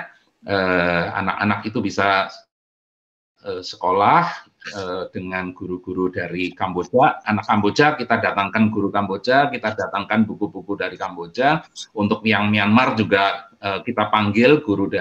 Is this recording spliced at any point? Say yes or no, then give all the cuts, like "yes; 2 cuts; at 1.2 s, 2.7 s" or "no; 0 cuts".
no; 0 cuts